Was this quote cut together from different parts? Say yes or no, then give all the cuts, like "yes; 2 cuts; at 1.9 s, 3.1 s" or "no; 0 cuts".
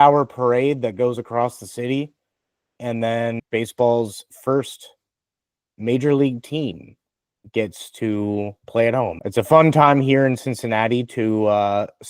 yes; 2 cuts; at 3.4 s, 9.2 s